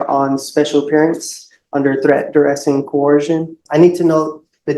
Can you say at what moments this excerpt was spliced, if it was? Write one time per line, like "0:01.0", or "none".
0:03.6